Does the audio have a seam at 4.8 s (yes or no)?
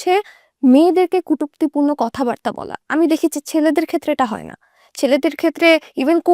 no